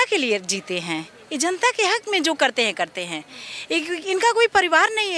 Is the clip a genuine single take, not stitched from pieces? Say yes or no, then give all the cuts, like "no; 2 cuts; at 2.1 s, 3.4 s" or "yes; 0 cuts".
yes; 0 cuts